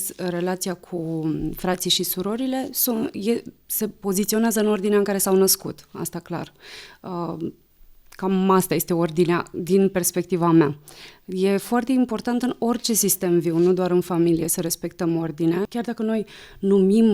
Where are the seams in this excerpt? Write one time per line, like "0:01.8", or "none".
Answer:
0:15.7